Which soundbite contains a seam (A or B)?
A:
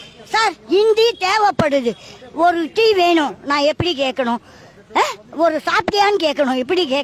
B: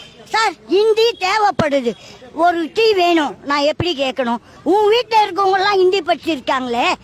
B